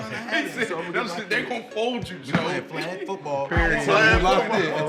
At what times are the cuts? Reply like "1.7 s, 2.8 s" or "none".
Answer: none